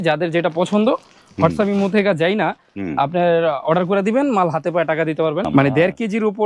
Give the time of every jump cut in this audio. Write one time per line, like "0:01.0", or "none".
0:05.5